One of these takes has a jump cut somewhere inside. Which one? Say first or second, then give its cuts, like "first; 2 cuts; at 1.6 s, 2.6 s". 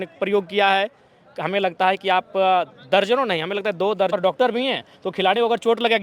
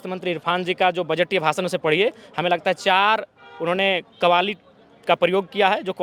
first; 1 cut; at 4.1 s